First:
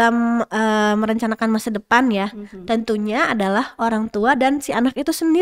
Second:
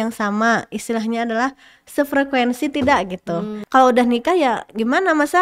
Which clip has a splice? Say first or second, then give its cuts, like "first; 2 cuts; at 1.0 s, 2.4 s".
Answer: second; 1 cut; at 3.6 s